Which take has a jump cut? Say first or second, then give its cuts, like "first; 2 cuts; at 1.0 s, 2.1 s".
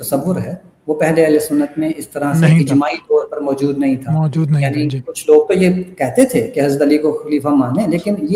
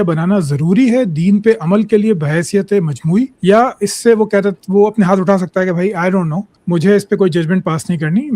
second; 2 cuts; at 3.3 s, 6.5 s